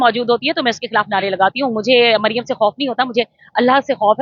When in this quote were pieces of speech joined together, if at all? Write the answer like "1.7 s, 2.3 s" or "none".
none